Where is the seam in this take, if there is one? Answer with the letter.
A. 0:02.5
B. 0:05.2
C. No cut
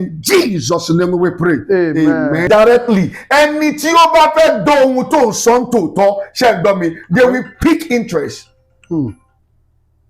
A